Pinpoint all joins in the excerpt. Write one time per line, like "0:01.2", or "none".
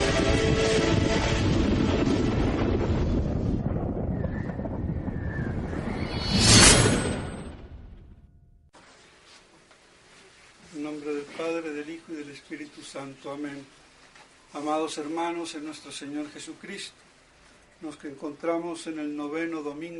none